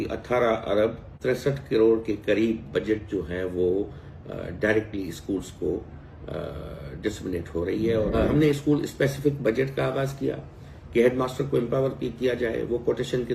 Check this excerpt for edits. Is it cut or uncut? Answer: cut